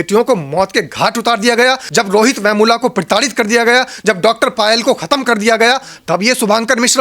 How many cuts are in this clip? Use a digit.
1